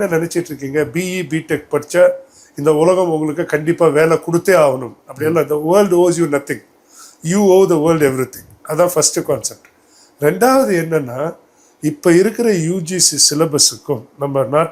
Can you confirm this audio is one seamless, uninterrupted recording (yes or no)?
yes